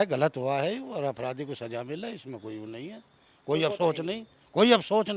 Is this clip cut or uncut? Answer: uncut